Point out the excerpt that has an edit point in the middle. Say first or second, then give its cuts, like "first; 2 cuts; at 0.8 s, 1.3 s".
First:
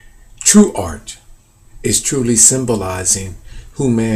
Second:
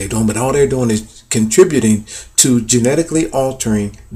second; 1 cut; at 1.0 s